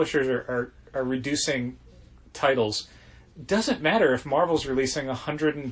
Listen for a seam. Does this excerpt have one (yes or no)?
no